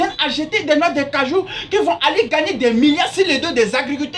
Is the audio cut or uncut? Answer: uncut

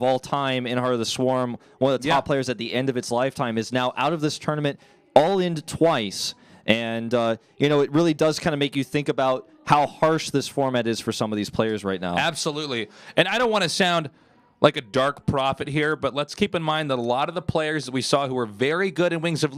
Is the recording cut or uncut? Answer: cut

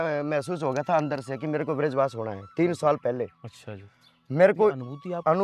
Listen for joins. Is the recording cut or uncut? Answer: uncut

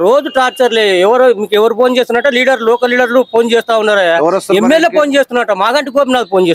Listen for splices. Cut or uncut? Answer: uncut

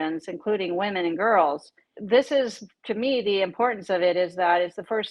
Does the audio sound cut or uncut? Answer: cut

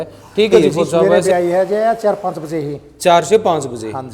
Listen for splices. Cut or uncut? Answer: cut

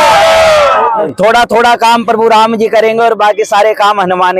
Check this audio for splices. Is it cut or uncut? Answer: cut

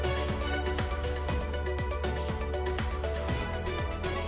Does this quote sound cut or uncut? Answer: uncut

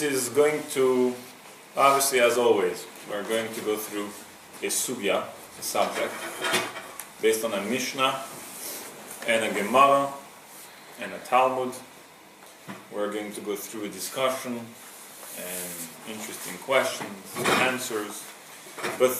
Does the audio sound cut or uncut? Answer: cut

